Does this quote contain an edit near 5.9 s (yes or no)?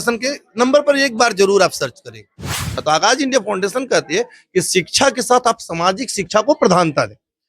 no